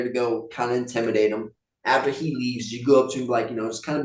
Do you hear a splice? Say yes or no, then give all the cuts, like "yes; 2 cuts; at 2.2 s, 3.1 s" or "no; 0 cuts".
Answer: no; 0 cuts